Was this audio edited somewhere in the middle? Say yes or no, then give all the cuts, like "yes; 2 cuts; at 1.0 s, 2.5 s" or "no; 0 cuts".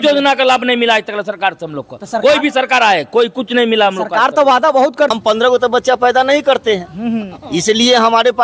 yes; 1 cut; at 5.1 s